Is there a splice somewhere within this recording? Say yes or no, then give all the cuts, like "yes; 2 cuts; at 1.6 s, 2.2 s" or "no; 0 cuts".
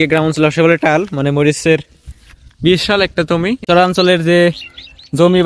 yes; 1 cut; at 3.7 s